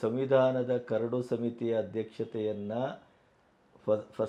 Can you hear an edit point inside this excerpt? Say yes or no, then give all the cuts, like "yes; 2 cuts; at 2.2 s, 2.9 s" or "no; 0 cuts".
no; 0 cuts